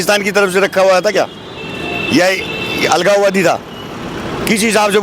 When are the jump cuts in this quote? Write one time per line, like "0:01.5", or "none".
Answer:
none